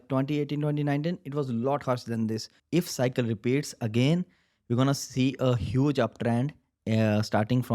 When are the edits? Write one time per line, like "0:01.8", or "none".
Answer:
0:02.5